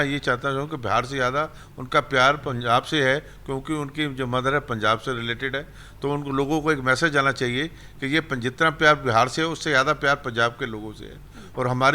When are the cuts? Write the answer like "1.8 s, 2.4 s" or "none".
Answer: none